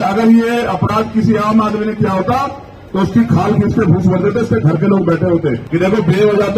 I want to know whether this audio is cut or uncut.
cut